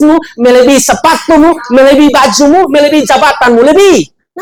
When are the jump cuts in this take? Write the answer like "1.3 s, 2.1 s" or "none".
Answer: none